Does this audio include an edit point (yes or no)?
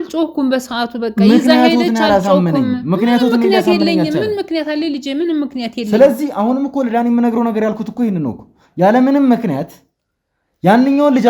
no